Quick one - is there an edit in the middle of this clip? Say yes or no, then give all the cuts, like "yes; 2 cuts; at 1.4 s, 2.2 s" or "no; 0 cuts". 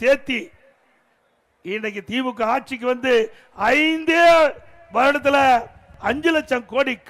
yes; 1 cut; at 5.9 s